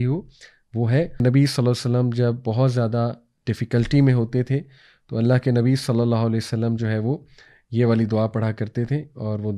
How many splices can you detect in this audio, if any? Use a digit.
1